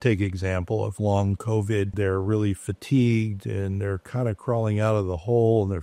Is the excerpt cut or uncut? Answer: cut